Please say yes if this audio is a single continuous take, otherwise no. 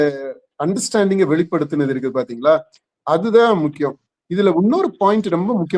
yes